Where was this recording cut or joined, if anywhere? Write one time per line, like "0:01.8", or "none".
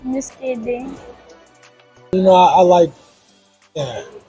0:02.1